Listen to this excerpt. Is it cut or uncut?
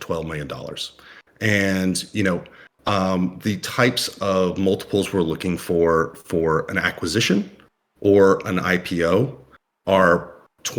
uncut